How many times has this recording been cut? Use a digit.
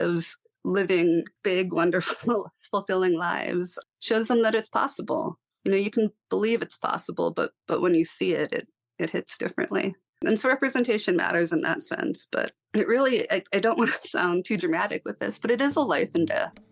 1